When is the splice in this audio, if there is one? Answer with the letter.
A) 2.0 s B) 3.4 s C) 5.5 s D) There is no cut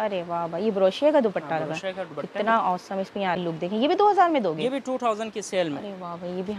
B